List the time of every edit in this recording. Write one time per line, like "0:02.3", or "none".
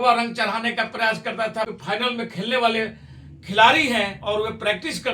0:01.8